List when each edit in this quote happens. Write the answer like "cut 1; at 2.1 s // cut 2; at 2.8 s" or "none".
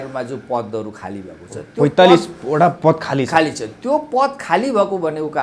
none